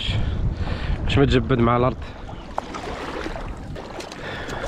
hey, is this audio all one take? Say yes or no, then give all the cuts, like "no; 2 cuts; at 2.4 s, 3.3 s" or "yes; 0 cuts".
no; 1 cut; at 3.8 s